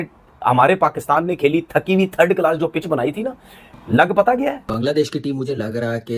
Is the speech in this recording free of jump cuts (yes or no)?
no